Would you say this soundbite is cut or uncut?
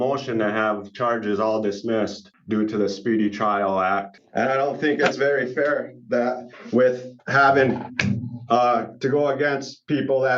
cut